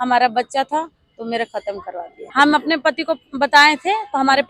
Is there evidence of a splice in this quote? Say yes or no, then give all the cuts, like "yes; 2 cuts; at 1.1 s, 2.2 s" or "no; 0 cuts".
yes; 1 cut; at 2.2 s